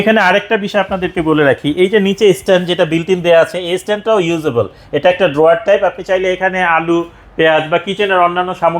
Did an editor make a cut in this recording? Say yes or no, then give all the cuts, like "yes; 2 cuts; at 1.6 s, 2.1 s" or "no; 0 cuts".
no; 0 cuts